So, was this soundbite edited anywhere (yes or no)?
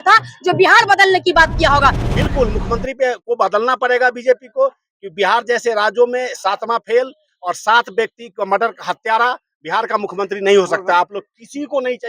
yes